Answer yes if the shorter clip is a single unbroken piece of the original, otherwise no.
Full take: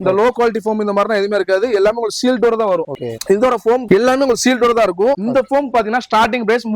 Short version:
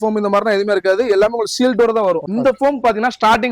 no